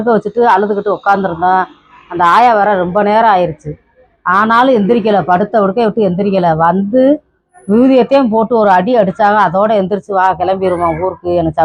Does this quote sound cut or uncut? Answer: uncut